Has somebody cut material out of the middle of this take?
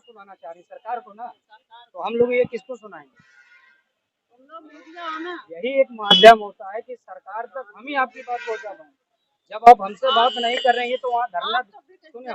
no; 0 cuts

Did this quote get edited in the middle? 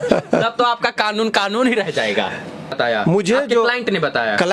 yes; 1 cut; at 2.8 s

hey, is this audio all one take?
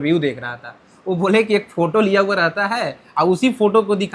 yes; 0 cuts

